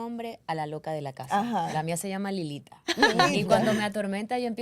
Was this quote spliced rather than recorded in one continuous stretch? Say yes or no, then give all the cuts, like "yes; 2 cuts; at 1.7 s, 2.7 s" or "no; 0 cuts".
no; 0 cuts